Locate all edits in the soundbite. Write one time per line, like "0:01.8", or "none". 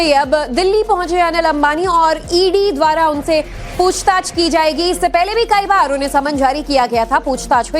none